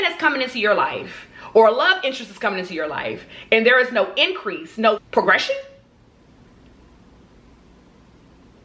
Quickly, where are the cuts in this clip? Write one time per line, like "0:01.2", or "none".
0:05.1